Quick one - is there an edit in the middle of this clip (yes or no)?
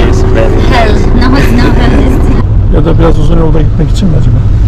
yes